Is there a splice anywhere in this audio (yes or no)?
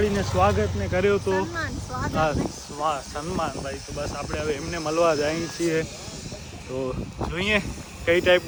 no